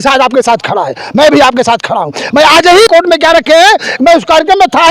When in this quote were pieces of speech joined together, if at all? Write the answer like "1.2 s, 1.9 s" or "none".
2.9 s